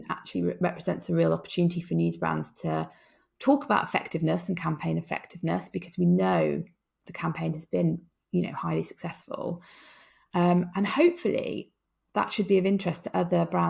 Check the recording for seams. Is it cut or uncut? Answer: uncut